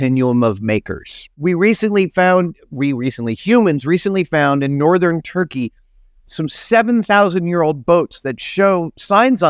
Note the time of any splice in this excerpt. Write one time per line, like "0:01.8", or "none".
0:01.3